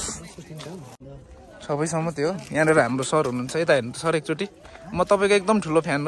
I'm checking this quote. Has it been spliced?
yes; 1 cut; at 1.0 s

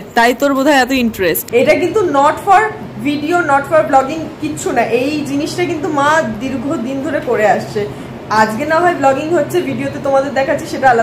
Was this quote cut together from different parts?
yes; 1 cut; at 1.4 s

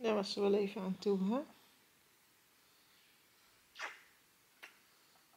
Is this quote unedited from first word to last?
yes; 0 cuts

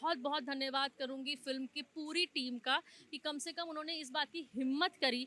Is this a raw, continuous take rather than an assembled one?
yes; 0 cuts

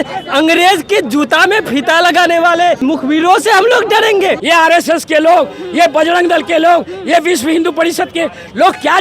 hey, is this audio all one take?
no; 2 cuts; at 2.8 s, 4.4 s

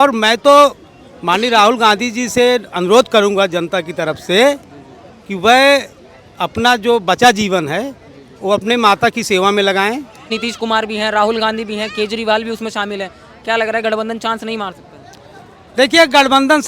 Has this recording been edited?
yes; 1 cut; at 10.3 s

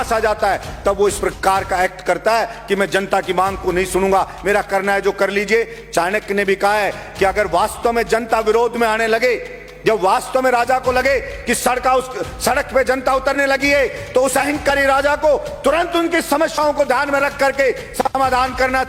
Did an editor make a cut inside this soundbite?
no; 0 cuts

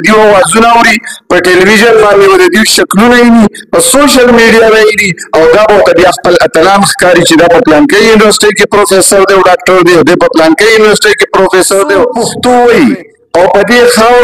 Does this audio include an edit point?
yes; 1 cut; at 12.2 s

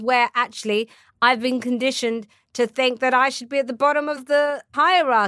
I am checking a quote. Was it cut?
yes; 1 cut; at 4.2 s

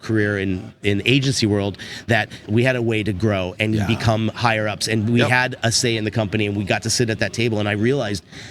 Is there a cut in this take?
yes; 1 cut; at 2.4 s

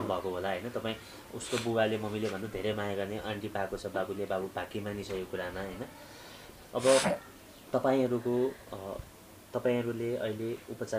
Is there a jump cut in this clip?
no; 0 cuts

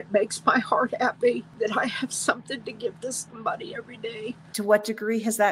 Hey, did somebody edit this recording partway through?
yes; 2 cuts; at 1.5 s, 4.4 s

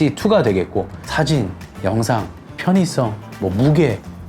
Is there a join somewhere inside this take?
yes; 2 cuts; at 1.1 s, 3.2 s

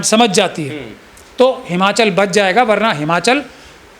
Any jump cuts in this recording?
no; 0 cuts

